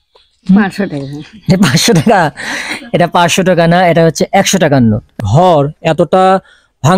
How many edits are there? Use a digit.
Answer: 1